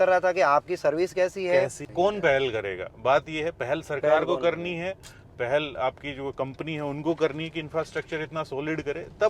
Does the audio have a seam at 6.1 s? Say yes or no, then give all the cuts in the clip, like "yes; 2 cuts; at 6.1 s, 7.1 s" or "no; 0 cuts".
no; 1 cut; at 1.8 s